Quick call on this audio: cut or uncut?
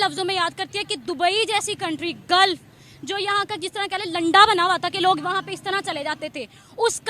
uncut